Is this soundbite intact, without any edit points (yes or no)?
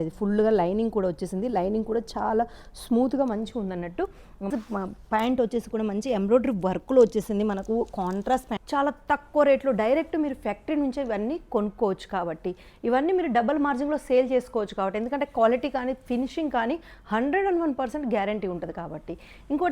no